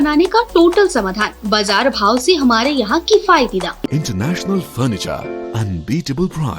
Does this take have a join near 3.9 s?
yes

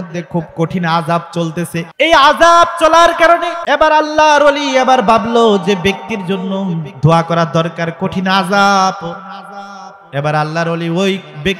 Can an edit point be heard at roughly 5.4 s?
no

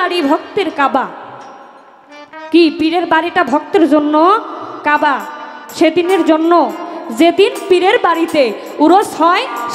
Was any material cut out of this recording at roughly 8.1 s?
no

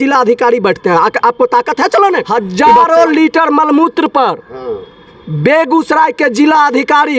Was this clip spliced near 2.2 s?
yes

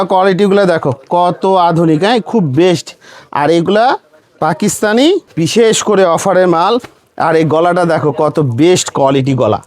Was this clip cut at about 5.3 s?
yes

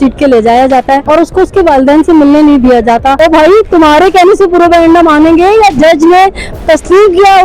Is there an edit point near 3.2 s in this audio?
yes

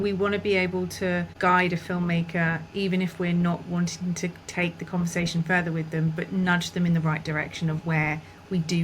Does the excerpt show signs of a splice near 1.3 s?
yes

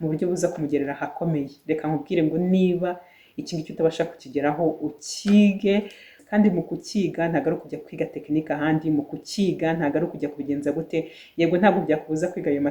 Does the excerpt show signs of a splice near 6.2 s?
yes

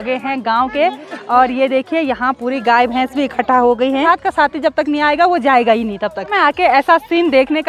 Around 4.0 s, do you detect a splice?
yes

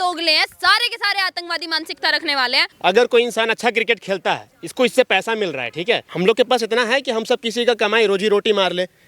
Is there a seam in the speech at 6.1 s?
yes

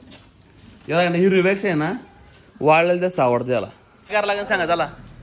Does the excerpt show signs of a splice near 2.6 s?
no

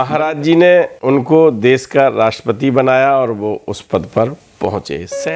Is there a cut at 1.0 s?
yes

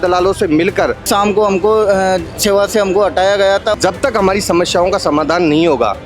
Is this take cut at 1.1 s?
yes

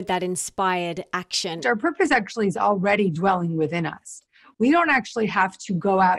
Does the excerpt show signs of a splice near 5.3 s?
no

